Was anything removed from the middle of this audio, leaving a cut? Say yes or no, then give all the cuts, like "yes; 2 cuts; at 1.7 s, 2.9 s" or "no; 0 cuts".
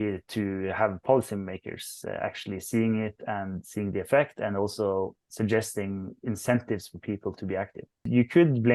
no; 0 cuts